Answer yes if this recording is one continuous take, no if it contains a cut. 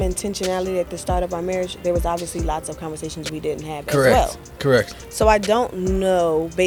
yes